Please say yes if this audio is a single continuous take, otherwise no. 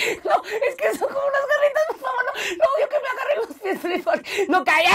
yes